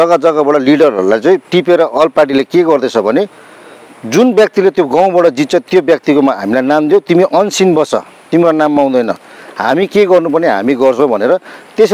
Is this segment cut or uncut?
uncut